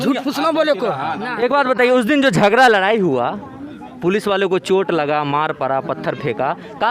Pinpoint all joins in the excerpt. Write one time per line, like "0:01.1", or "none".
0:01.2